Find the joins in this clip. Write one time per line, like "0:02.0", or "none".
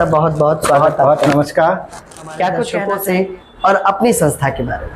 0:02.9